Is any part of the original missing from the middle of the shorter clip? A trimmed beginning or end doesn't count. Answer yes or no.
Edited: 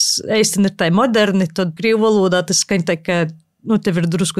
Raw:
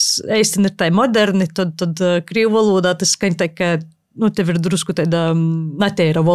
yes